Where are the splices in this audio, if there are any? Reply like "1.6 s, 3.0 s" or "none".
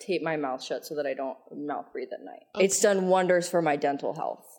2.4 s